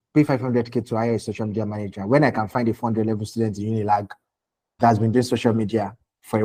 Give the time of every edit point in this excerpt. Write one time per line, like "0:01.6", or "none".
none